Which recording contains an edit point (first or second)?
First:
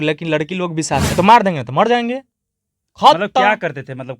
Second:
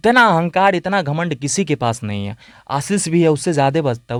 first